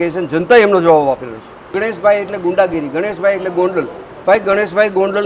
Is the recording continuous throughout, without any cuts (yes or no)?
no